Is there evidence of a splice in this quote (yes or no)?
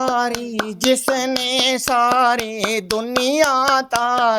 no